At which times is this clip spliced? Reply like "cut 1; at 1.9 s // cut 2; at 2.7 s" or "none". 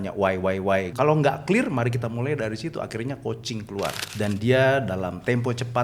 cut 1; at 0.9 s // cut 2; at 4.0 s